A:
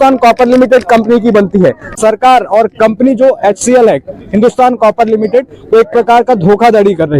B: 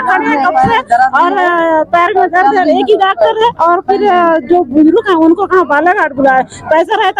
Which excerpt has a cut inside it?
A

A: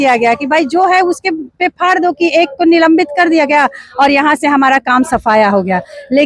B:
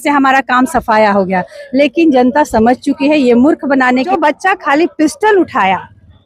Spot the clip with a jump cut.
B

